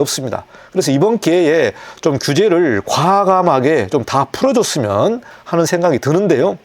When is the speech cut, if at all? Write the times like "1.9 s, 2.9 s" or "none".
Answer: 5.3 s